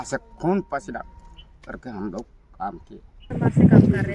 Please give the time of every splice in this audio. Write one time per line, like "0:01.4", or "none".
0:03.2